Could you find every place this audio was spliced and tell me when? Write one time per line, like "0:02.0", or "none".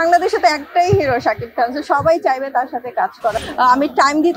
0:03.3

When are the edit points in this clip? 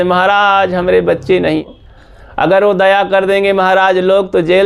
0:01.7

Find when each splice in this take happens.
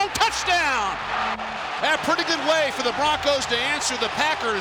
none

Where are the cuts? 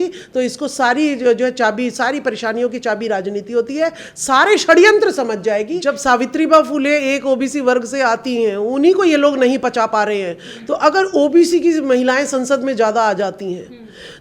0:05.7

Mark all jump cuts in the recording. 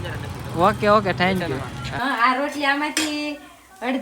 0:01.8

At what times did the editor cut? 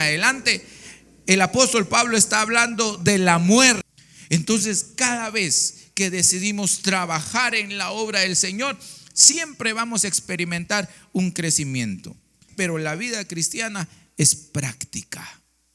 0:03.9
0:12.4

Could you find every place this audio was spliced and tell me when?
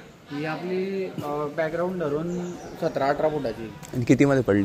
none

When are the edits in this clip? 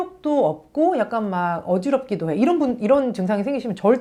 none

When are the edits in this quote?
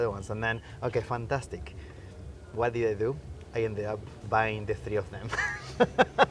none

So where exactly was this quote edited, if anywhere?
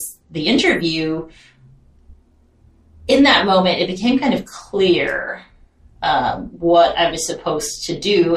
none

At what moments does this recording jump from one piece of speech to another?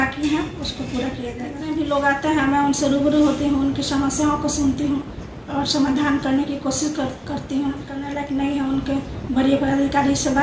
0:01.5
0:08.1

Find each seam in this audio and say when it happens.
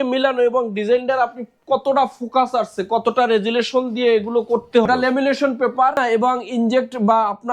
0:04.8
0:06.0

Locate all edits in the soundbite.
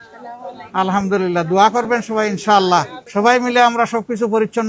0:03.0

